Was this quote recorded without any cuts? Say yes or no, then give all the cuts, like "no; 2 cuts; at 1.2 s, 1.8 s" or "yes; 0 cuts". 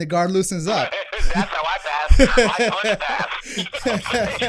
yes; 0 cuts